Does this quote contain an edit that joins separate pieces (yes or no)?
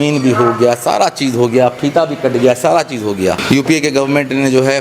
yes